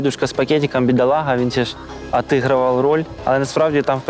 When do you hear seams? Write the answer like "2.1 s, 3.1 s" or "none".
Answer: 3.1 s

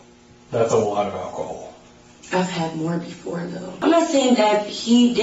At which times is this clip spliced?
3.7 s

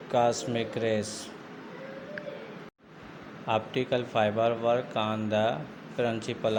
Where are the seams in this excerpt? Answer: none

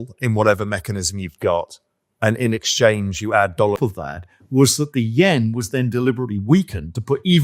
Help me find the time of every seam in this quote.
3.8 s

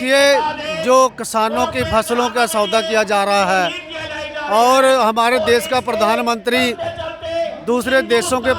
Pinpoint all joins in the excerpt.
none

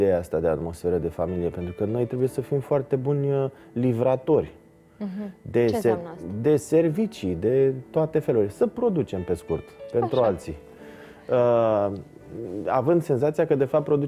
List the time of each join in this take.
none

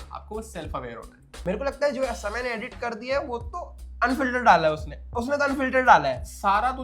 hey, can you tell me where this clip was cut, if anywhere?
1.3 s

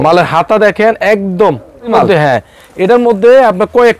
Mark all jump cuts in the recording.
1.9 s

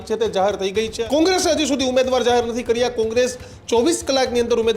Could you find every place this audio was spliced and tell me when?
1.0 s

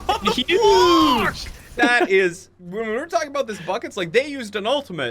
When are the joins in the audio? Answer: 1.7 s

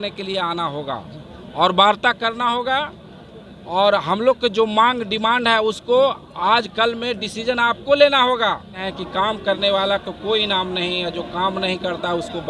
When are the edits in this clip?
8.9 s

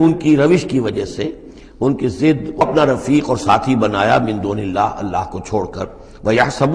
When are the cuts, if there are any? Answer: 2.6 s

